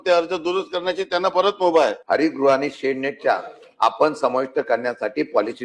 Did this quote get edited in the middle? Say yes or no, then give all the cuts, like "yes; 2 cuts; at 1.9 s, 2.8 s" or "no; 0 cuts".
yes; 1 cut; at 2.0 s